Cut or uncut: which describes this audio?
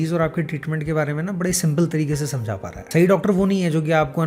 cut